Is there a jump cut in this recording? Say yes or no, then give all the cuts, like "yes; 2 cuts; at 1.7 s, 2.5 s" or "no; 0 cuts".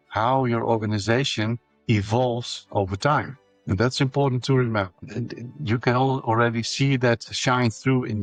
no; 0 cuts